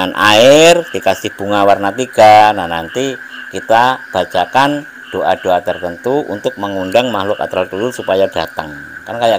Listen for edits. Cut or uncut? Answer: uncut